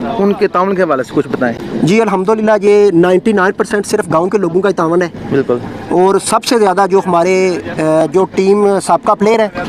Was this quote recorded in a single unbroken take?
yes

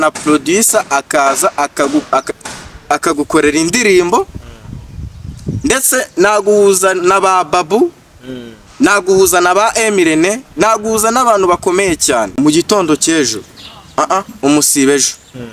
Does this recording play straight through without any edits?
no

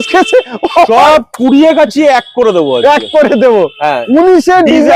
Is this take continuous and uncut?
yes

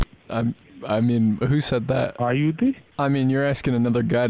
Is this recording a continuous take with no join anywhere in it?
no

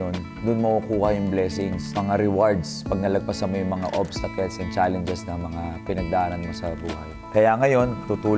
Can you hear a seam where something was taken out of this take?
yes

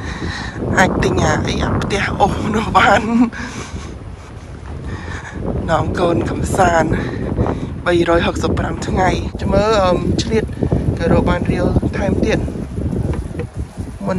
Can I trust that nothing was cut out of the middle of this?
no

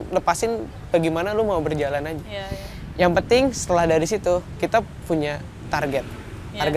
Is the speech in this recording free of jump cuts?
yes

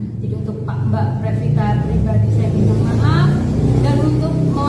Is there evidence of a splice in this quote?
no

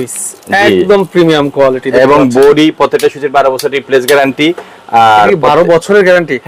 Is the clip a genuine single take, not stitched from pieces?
yes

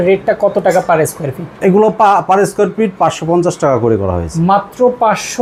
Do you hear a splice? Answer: no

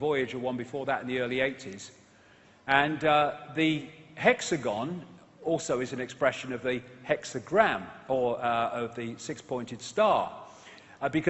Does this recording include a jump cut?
yes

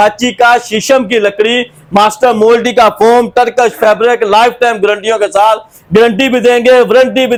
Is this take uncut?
yes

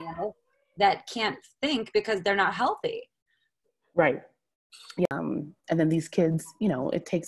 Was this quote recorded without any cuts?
no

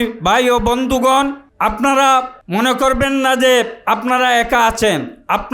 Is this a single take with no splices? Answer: no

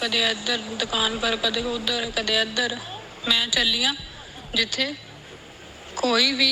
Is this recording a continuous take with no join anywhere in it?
yes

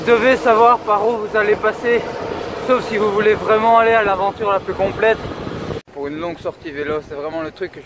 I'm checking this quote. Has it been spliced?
yes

